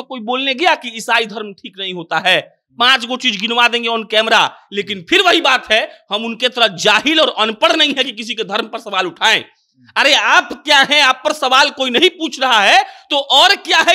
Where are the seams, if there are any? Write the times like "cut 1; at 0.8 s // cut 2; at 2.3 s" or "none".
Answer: none